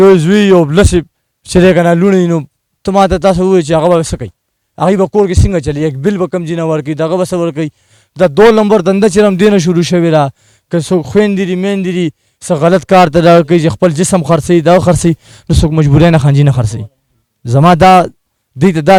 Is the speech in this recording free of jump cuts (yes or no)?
yes